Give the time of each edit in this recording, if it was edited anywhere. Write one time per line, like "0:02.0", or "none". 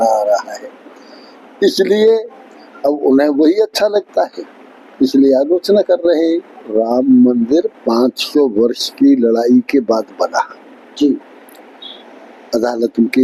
0:06.7